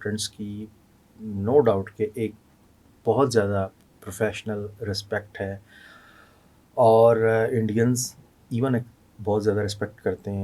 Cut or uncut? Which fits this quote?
uncut